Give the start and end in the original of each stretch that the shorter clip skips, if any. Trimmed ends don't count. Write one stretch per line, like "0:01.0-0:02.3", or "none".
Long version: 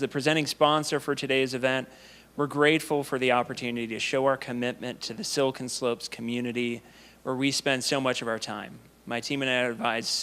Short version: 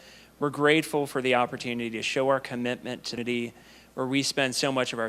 0:05.1-0:06.5